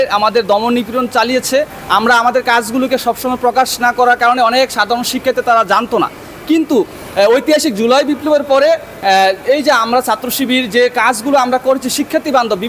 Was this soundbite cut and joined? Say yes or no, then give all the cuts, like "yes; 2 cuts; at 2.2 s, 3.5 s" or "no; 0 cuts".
no; 0 cuts